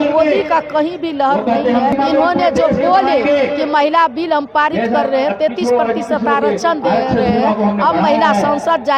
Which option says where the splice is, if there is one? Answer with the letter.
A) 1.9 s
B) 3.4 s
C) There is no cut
A